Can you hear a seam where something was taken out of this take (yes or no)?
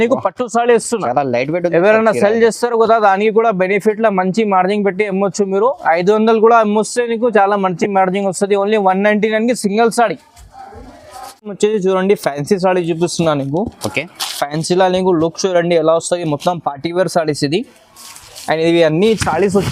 no